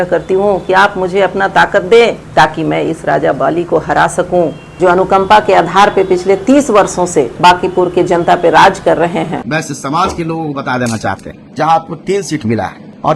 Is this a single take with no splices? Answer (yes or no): no